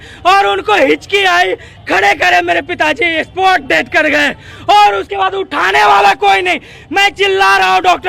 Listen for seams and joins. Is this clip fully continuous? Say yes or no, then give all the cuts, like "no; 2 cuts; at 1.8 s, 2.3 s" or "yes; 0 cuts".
yes; 0 cuts